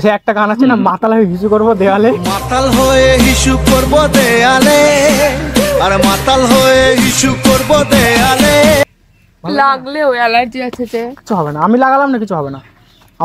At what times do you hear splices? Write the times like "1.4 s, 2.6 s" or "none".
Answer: 8.8 s